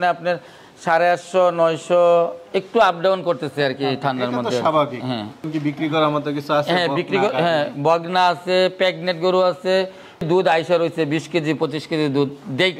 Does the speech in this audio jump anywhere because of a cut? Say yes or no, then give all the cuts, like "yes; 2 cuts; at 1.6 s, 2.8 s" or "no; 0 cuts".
yes; 2 cuts; at 5.4 s, 10.2 s